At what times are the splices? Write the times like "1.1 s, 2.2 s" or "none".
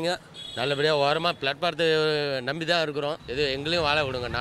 3.2 s